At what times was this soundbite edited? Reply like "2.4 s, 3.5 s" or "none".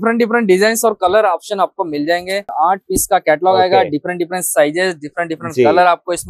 2.5 s